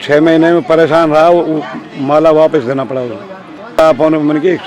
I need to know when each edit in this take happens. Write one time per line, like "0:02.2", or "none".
0:03.8

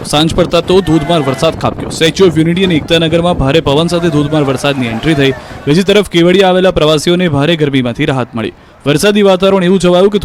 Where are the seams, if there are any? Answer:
0:01.6

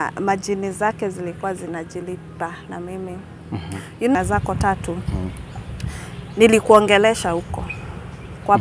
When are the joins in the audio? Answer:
0:04.2

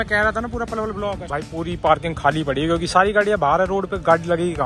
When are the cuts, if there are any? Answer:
0:01.3

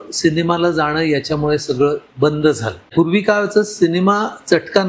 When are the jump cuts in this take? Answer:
0:02.9

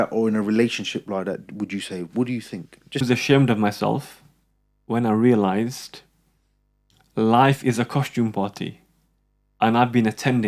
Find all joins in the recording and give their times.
0:03.0

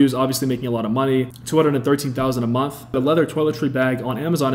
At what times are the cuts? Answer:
0:01.4
0:03.0

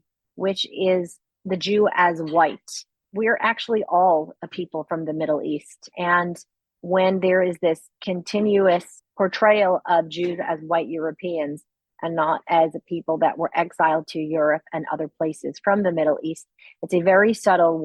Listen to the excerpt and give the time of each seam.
0:03.0

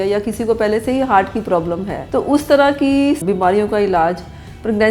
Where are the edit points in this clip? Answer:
0:02.0
0:03.2

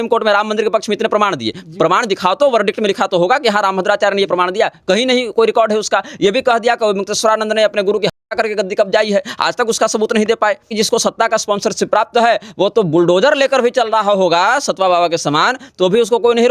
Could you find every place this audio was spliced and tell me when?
0:10.7

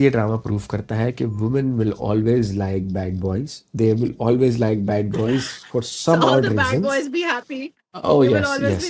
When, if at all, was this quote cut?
none

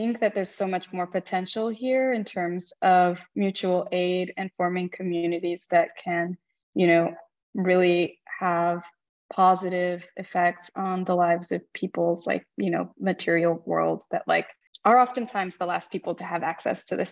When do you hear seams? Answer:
none

